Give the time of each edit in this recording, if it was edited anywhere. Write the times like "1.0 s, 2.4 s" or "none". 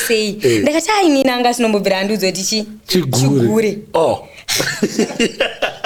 none